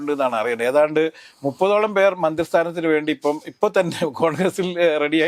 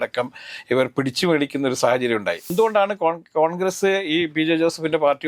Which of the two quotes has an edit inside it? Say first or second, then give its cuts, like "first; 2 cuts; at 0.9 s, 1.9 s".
second; 1 cut; at 2.5 s